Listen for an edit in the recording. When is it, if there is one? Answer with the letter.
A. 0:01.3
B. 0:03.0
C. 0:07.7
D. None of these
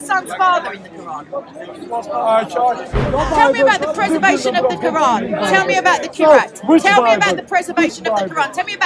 B